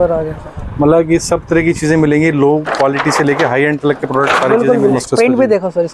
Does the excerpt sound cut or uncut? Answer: cut